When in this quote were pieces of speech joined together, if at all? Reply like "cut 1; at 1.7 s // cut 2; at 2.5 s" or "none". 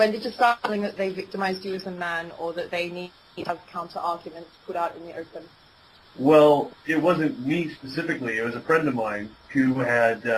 none